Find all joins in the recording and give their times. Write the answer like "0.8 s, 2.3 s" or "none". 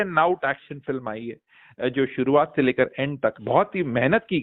3.4 s